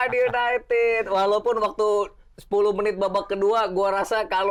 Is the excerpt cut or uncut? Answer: uncut